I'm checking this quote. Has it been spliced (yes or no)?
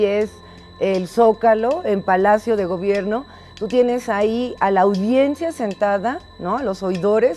yes